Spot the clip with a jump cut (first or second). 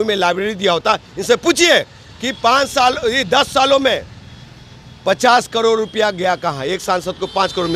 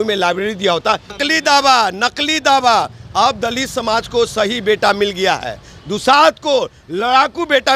second